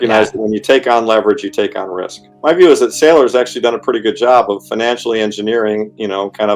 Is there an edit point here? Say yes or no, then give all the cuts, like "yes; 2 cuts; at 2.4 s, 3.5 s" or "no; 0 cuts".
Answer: yes; 1 cut; at 2.3 s